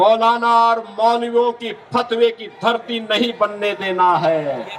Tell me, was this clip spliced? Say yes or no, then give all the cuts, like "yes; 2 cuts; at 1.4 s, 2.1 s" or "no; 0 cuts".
no; 0 cuts